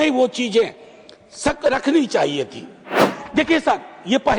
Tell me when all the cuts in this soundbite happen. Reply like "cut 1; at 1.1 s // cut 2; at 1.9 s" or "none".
cut 1; at 3.2 s